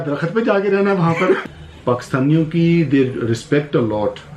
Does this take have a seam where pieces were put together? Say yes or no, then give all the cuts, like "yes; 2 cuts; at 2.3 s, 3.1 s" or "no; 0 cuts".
yes; 1 cut; at 1.4 s